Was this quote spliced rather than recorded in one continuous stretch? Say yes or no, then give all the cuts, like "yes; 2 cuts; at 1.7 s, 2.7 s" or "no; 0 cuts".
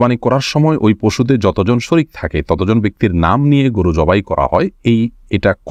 no; 0 cuts